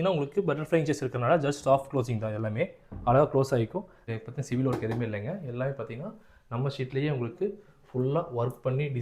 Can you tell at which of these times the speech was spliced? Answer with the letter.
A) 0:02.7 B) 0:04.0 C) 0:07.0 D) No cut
B